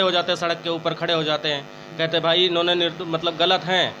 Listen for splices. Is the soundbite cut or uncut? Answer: uncut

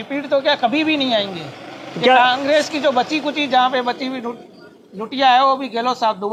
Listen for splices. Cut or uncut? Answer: uncut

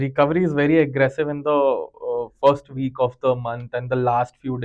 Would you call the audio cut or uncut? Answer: uncut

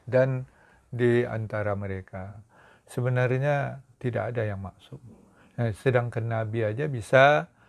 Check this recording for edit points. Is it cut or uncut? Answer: cut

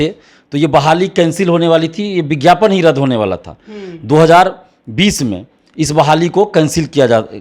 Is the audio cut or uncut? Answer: uncut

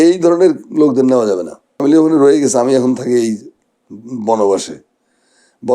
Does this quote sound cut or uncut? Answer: cut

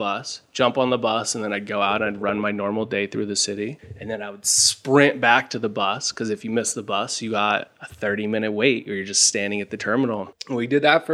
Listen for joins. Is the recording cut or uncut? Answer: uncut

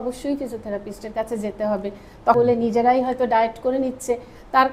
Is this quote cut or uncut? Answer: cut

